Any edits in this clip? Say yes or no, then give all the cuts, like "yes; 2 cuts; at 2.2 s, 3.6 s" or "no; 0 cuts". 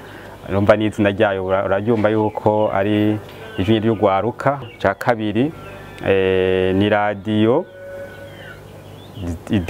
yes; 1 cut; at 4.6 s